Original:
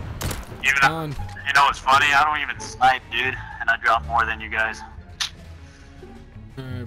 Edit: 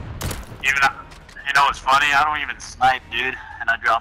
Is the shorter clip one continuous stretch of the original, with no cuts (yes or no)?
yes